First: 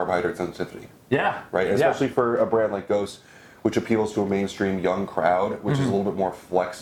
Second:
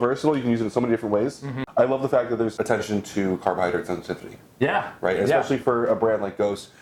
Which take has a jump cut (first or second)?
second